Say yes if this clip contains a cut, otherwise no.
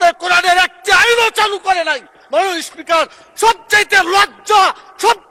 no